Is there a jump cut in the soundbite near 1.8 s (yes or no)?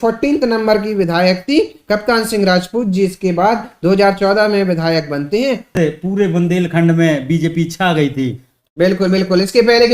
no